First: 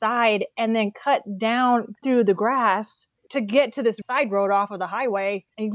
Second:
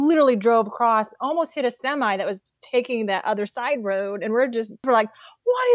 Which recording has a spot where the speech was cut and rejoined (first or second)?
second